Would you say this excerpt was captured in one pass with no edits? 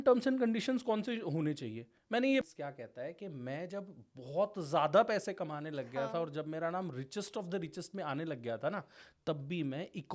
no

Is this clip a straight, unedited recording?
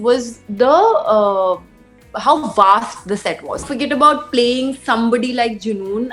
no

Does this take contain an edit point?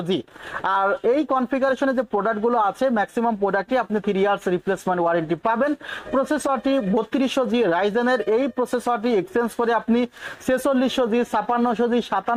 no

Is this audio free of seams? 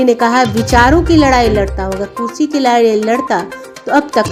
yes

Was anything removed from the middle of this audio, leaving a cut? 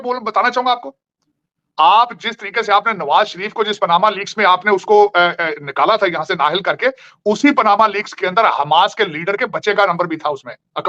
no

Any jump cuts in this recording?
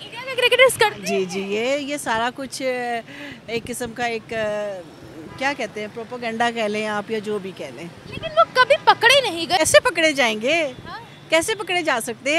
yes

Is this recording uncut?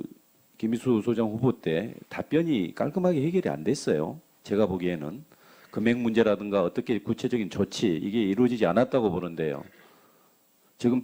yes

